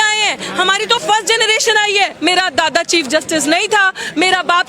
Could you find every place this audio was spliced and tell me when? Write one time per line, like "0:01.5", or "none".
0:02.2